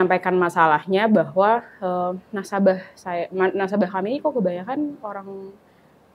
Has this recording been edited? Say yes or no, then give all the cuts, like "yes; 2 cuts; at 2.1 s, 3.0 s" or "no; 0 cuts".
no; 0 cuts